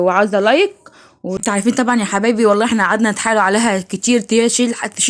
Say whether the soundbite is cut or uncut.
cut